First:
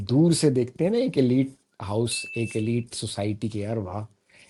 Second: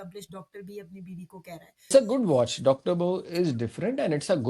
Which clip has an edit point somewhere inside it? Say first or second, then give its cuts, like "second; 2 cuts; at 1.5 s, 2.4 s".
second; 1 cut; at 1.9 s